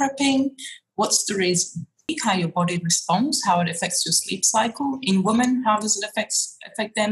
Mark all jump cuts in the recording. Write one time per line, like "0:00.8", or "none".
0:02.1